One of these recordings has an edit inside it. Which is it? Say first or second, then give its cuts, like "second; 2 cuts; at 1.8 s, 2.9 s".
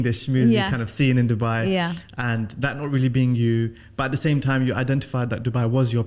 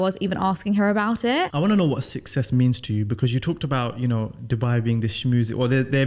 second; 1 cut; at 1.5 s